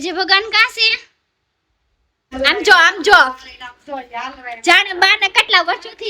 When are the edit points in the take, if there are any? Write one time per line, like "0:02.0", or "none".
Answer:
0:02.2